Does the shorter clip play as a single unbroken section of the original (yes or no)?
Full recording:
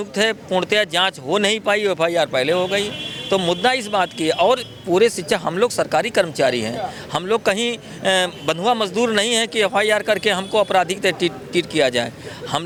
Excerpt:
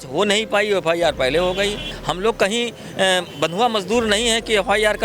no